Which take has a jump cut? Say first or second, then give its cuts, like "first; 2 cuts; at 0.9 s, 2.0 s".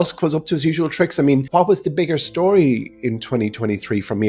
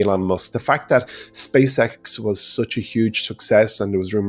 first; 1 cut; at 1.5 s